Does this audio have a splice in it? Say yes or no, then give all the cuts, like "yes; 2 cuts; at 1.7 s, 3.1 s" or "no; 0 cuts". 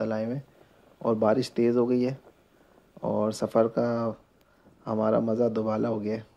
no; 0 cuts